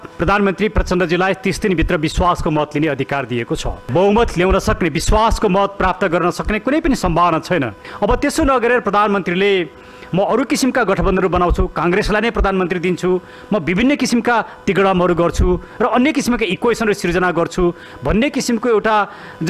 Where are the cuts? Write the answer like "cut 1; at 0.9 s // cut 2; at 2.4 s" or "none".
cut 1; at 3.7 s // cut 2; at 7.8 s